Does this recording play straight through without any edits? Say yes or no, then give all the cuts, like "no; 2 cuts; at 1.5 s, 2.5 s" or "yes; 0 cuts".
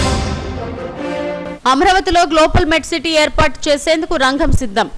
no; 1 cut; at 1.4 s